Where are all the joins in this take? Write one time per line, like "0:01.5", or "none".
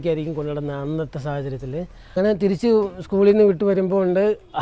0:02.1